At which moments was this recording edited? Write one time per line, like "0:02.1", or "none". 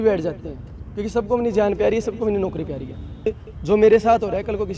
0:03.3